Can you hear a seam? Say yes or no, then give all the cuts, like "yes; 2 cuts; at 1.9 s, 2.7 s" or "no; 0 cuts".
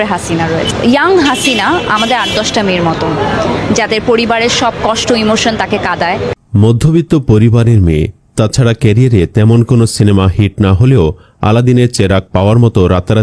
no; 0 cuts